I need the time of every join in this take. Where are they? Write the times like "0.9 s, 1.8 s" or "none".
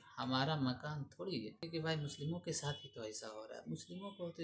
1.7 s